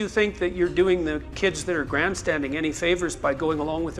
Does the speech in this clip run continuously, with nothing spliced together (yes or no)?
yes